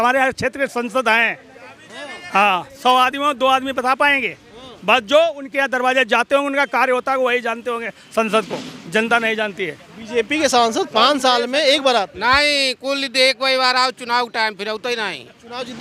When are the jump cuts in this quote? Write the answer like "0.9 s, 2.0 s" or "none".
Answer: none